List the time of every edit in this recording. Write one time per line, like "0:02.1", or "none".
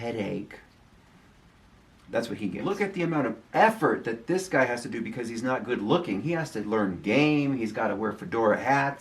0:02.6